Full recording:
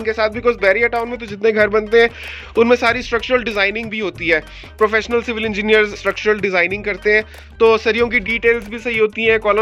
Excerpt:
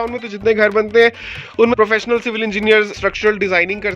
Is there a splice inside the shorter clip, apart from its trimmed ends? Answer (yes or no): yes